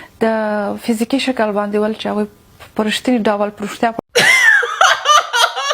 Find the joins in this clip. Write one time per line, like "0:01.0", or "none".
0:04.0